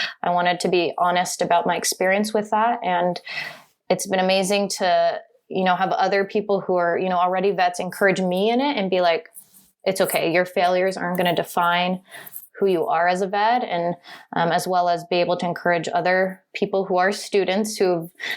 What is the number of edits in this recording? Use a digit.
1